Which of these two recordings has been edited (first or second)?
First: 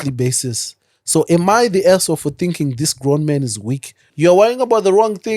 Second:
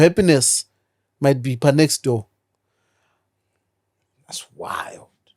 first